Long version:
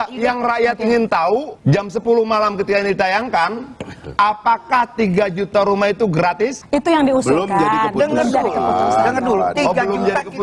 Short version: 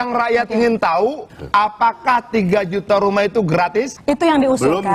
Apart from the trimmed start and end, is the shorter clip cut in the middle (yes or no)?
yes